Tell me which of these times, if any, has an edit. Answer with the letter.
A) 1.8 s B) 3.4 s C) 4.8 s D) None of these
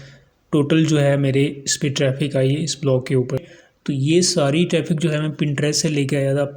B